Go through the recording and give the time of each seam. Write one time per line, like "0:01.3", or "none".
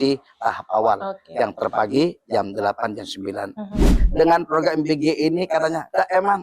0:03.9